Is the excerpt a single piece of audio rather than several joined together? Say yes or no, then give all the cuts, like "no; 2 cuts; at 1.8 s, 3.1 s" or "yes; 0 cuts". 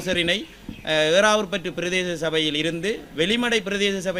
yes; 0 cuts